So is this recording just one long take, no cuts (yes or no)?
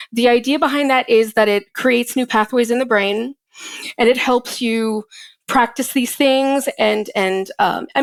yes